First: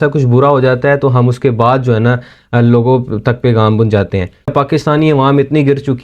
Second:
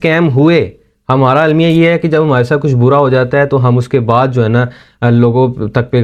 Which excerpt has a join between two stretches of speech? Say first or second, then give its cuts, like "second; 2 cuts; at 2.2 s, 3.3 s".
first; 1 cut; at 4.5 s